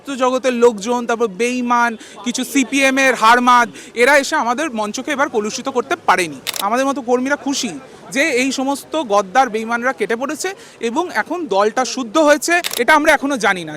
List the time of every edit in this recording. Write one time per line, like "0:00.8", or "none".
0:06.5
0:12.7